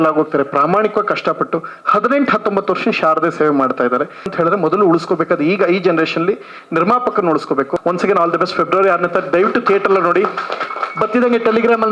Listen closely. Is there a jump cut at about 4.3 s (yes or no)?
yes